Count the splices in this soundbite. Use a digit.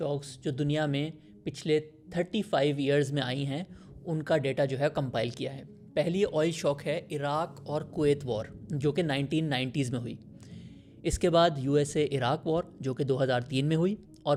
0